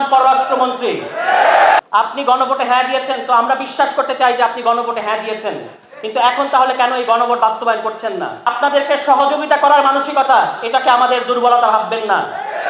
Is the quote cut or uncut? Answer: cut